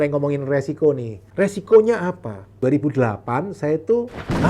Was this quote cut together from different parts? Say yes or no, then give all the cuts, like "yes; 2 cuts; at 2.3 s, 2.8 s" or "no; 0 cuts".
yes; 1 cut; at 2.4 s